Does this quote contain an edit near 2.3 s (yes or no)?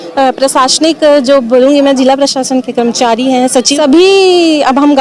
no